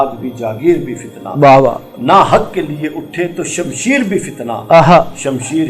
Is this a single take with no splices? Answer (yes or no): yes